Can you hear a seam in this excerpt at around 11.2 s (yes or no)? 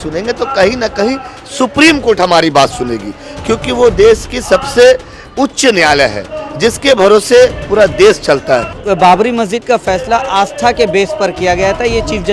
no